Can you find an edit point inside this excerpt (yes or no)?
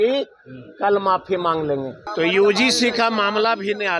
yes